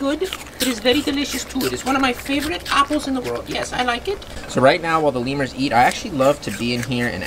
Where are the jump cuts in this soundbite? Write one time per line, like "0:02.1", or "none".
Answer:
none